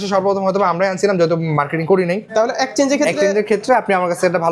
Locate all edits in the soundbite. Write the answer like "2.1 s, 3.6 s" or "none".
2.2 s